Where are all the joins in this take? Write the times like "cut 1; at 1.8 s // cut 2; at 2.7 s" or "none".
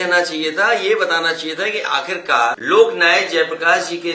cut 1; at 2.6 s